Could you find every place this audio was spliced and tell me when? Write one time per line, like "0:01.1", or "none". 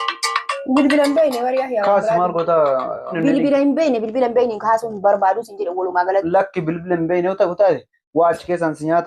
none

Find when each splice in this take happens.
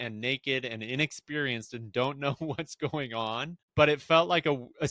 0:03.6

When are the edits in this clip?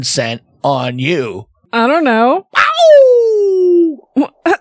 0:01.7

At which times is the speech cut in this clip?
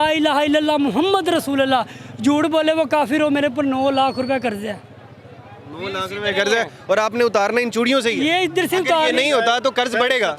none

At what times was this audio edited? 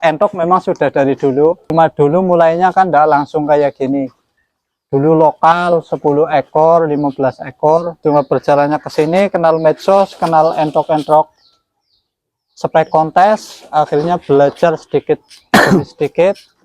0:01.7
0:07.9

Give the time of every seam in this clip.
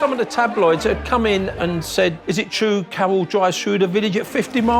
none

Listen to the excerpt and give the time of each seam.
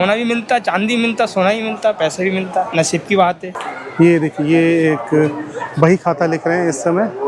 0:03.6

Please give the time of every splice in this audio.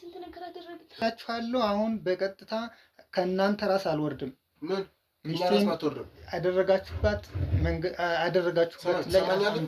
0:01.0

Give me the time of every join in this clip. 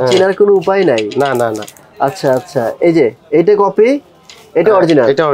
none

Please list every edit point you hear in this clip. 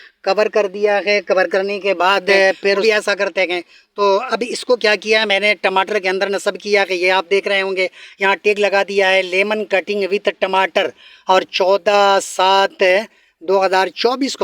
0:02.8

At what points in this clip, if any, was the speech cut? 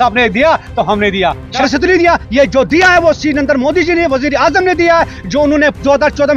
0:01.5

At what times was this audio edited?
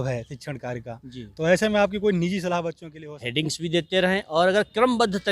0:02.8

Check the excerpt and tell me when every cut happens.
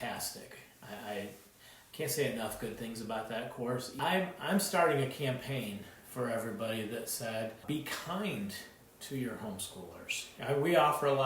0:03.9
0:07.6
0:10.2

